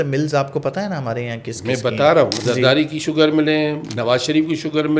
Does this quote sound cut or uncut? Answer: cut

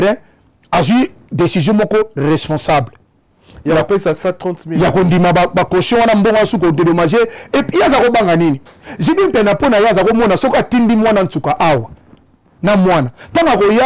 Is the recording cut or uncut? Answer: uncut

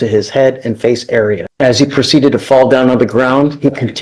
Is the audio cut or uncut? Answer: cut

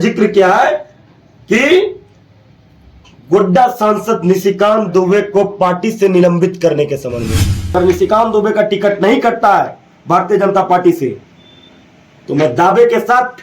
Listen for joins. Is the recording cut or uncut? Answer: cut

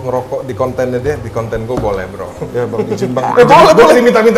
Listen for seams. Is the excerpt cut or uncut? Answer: uncut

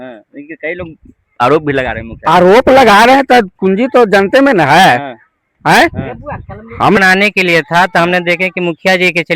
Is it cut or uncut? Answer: cut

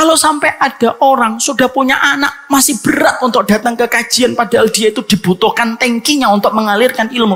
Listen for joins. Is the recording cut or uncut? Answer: uncut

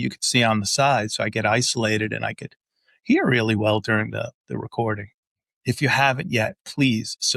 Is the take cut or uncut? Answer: cut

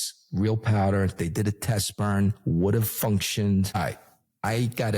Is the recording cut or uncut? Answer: cut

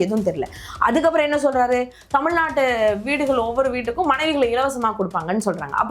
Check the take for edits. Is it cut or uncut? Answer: uncut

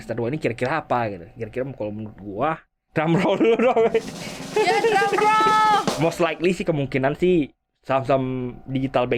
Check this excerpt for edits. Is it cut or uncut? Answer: cut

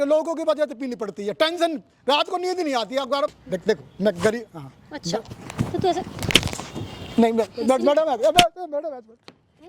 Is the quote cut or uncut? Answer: cut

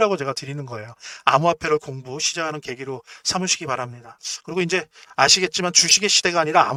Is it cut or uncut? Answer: uncut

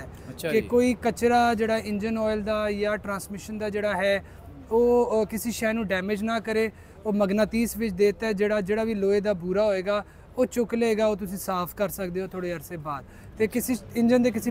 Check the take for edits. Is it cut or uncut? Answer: uncut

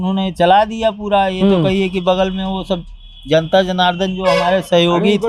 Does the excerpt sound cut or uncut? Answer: uncut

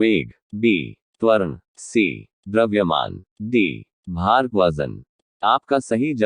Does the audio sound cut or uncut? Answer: cut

